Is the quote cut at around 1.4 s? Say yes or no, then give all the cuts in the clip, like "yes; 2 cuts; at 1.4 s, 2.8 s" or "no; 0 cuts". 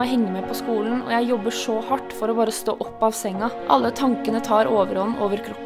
no; 1 cut; at 3.6 s